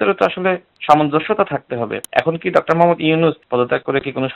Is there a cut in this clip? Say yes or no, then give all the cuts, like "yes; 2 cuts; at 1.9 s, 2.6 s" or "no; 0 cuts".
yes; 2 cuts; at 1.9 s, 3.4 s